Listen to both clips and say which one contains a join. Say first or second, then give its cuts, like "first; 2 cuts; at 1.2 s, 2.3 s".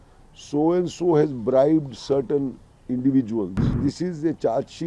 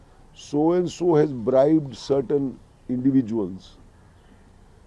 first; 1 cut; at 3.8 s